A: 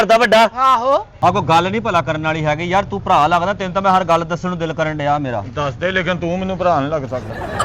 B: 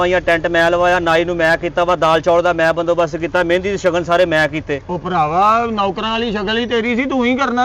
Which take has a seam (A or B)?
A